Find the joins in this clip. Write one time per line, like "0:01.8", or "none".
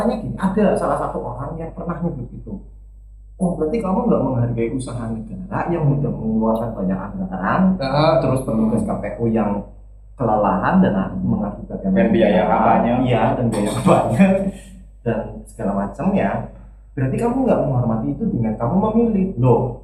none